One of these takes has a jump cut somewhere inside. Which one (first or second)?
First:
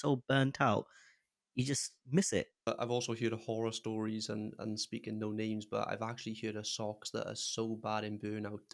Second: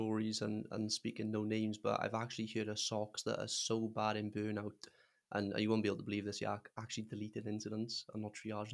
first